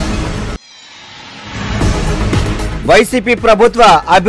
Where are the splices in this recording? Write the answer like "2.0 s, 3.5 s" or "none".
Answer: 2.3 s